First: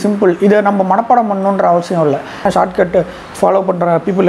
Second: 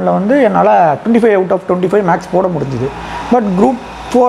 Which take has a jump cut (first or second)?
first